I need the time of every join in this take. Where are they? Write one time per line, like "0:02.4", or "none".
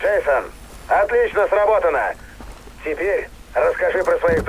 none